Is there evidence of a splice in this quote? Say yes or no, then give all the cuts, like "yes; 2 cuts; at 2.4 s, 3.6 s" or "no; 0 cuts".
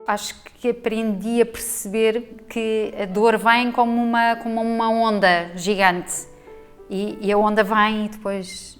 yes; 1 cut; at 2.3 s